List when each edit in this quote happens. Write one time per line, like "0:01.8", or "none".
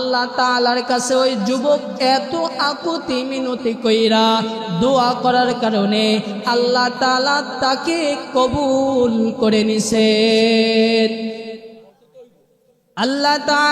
0:11.7